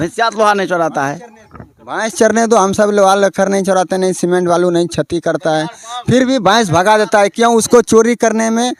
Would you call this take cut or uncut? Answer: uncut